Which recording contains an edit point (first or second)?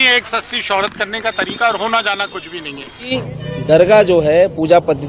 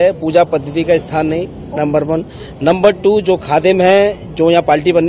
first